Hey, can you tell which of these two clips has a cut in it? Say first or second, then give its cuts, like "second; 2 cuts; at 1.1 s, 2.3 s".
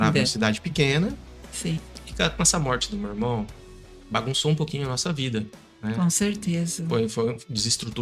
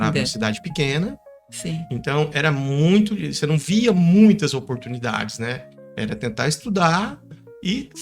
first; 1 cut; at 1.9 s